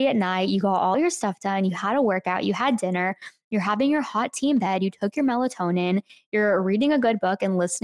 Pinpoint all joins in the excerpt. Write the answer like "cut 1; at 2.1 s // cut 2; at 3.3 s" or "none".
none